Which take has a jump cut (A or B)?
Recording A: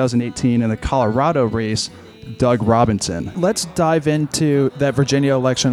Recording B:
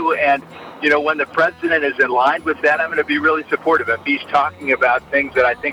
A